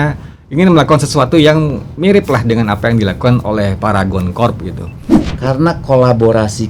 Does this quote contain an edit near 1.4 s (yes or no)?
no